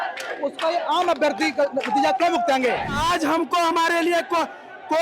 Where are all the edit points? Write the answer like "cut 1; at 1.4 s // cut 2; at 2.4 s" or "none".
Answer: cut 1; at 3.0 s